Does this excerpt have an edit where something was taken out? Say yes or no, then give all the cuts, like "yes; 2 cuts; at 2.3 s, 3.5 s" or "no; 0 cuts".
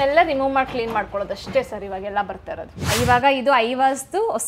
yes; 1 cut; at 2.8 s